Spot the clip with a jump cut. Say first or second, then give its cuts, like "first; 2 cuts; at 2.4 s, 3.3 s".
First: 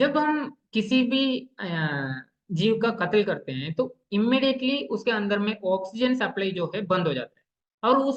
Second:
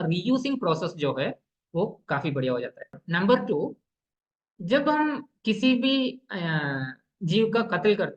second; 1 cut; at 3.0 s